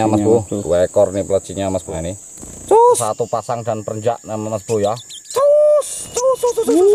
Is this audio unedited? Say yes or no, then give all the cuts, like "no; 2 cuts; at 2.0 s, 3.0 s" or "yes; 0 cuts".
no; 3 cuts; at 1.8 s, 3.1 s, 5.1 s